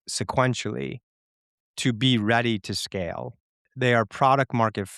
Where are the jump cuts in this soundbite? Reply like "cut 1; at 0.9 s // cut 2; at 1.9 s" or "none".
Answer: cut 1; at 3.7 s